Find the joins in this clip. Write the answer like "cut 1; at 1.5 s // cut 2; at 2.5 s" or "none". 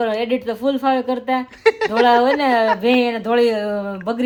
none